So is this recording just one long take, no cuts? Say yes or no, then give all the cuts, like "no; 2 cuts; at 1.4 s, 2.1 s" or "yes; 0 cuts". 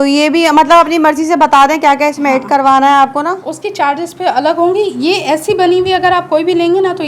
yes; 0 cuts